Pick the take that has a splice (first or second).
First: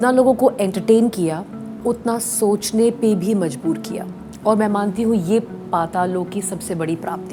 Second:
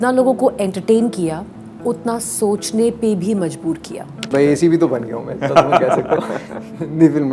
second